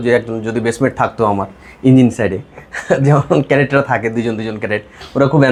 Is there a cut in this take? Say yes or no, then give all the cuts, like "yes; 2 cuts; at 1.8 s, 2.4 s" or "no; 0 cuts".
no; 0 cuts